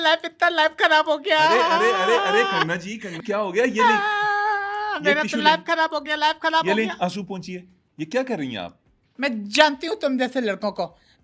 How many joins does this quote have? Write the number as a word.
zero